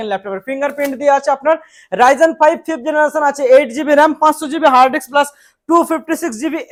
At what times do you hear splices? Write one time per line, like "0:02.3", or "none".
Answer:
none